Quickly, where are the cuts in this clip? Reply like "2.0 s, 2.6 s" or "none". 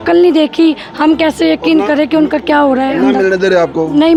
none